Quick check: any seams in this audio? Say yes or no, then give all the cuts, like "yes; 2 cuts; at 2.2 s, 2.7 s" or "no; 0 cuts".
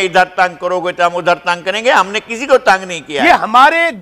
yes; 1 cut; at 3.1 s